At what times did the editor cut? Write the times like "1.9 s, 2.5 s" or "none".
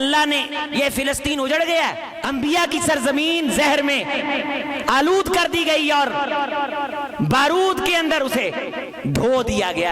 2.1 s, 8.8 s